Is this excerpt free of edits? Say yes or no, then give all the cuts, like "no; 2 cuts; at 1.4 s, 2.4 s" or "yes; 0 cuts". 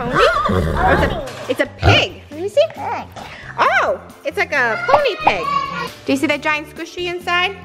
no; 1 cut; at 5.9 s